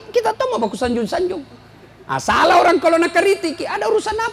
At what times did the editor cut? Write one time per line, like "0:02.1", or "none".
none